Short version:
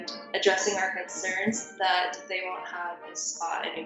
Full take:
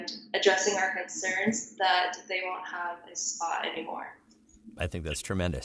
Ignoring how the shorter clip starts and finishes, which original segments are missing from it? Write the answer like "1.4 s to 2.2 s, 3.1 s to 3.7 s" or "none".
none